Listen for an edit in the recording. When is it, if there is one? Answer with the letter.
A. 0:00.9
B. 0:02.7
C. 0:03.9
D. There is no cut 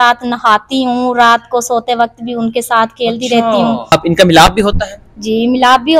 C